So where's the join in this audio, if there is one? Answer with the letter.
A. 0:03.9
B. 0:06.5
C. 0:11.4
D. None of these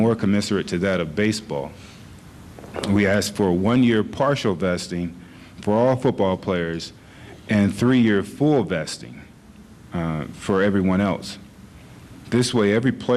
A